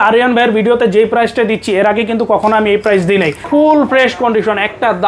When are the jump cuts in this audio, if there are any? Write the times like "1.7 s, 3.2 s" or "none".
3.4 s